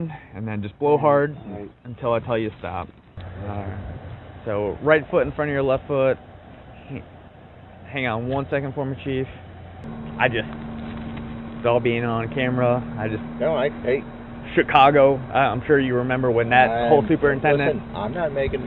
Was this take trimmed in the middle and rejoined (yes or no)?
yes